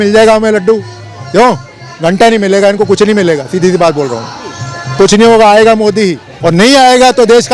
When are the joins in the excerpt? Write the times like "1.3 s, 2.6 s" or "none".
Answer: 6.3 s